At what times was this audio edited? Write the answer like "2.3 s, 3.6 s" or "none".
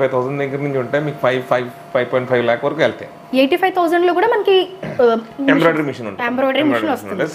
none